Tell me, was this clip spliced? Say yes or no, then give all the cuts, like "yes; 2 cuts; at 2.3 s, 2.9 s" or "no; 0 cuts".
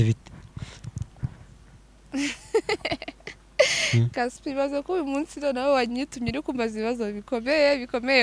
no; 0 cuts